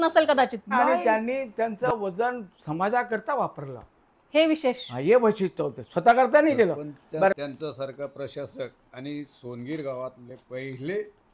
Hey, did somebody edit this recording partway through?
yes; 2 cuts; at 0.9 s, 7.4 s

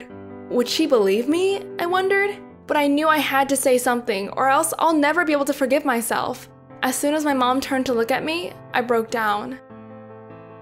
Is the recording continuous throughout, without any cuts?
no; 1 cut; at 9.6 s

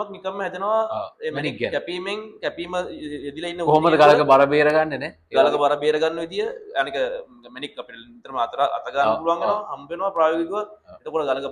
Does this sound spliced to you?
no; 0 cuts

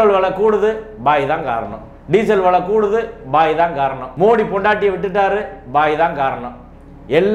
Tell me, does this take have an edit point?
no; 0 cuts

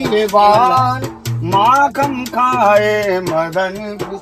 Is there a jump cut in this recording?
no; 0 cuts

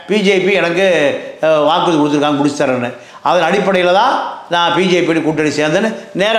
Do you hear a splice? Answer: no; 0 cuts

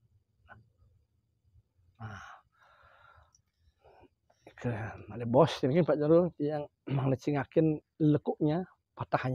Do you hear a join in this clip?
no; 0 cuts

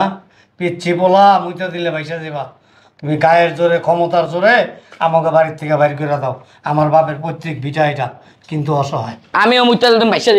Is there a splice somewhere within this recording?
no; 0 cuts

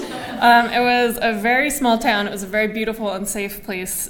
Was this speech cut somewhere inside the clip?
no; 0 cuts

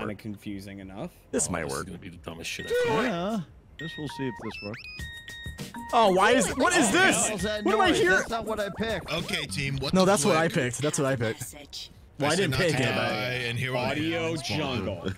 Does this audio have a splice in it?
no; 0 cuts

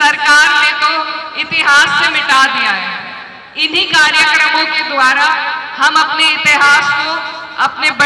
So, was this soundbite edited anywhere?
no; 0 cuts

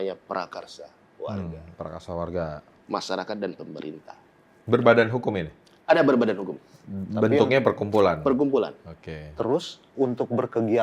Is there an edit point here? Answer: yes; 1 cut; at 2.7 s

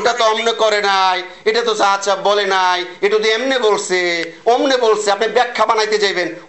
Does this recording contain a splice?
no; 0 cuts

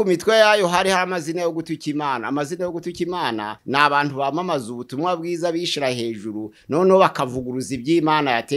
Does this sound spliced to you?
no; 0 cuts

